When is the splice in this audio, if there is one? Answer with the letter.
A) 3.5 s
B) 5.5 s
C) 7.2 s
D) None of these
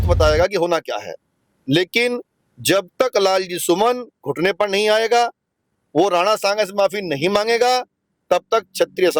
D